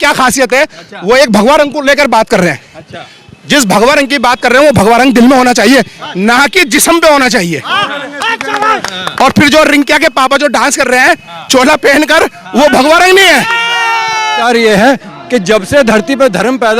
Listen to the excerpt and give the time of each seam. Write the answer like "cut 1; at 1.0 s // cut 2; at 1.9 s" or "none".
cut 1; at 14.4 s